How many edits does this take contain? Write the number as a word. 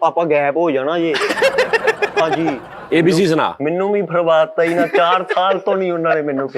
one